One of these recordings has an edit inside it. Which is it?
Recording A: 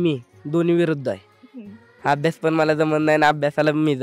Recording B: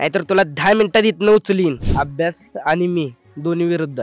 B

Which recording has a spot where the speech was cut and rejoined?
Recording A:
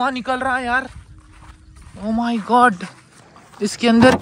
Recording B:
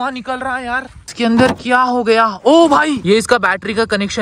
B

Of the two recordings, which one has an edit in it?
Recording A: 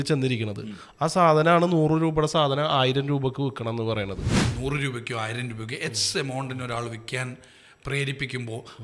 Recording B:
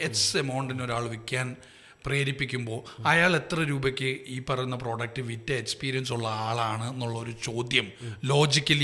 A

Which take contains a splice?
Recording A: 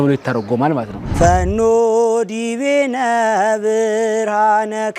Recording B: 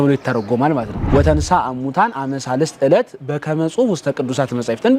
B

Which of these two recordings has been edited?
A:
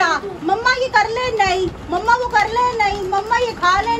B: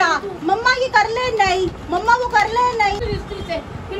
B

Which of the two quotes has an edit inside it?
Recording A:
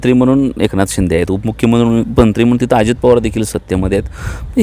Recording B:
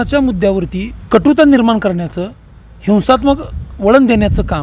B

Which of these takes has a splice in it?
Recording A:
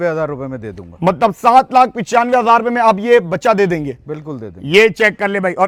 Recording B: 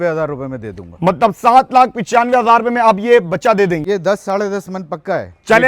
B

